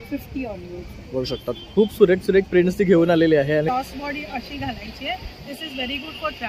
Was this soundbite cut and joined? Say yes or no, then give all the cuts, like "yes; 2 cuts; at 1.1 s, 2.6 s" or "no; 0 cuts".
yes; 1 cut; at 3.7 s